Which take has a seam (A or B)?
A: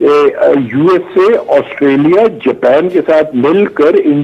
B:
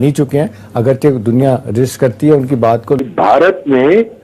B